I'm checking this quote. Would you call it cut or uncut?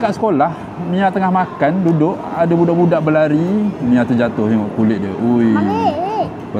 uncut